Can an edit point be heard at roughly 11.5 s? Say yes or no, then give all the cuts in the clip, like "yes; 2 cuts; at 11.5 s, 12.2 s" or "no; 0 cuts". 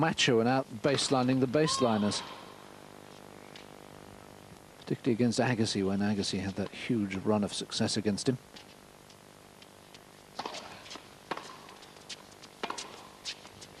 no; 1 cut; at 5.9 s